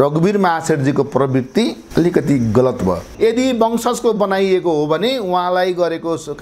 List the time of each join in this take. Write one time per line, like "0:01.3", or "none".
0:01.8
0:03.1